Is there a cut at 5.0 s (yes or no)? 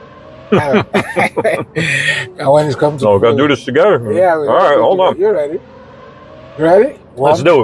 no